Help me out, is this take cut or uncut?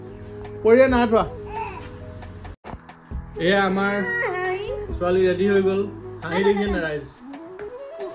cut